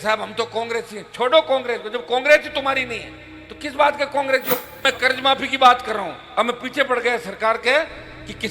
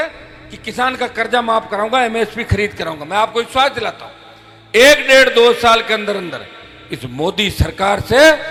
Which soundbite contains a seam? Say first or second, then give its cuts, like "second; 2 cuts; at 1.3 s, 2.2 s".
first; 1 cut; at 4.8 s